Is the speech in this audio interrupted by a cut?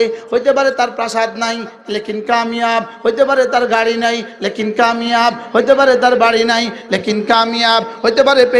no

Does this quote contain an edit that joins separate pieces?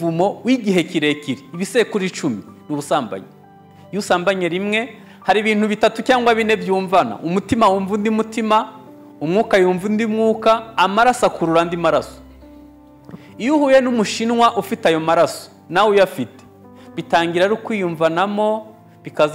yes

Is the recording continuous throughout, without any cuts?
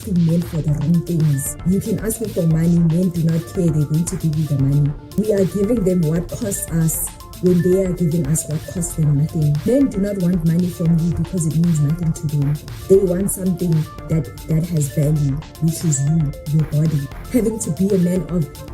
no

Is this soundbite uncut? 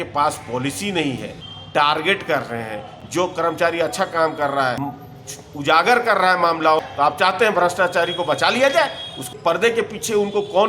no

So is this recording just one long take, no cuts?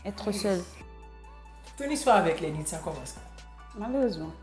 no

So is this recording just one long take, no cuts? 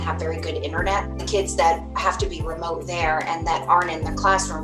no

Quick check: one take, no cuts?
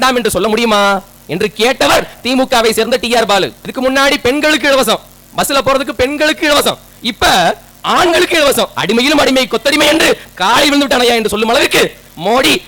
no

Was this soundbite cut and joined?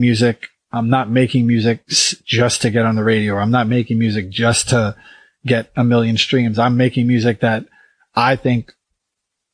no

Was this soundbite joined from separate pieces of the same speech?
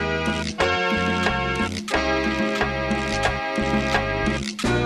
no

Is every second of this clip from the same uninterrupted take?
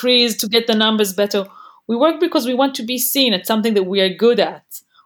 yes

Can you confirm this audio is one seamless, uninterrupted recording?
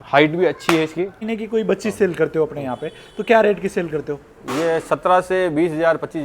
no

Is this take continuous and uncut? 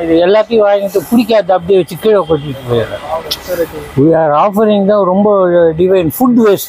yes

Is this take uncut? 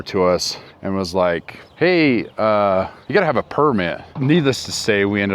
no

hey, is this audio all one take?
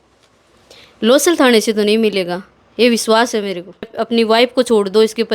no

